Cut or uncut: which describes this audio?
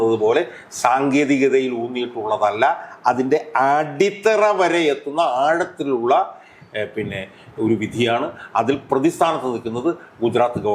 uncut